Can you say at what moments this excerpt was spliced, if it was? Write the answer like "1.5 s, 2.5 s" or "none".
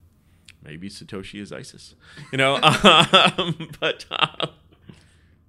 none